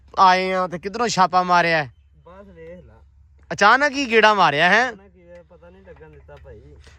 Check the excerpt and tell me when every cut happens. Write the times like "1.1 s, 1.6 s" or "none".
none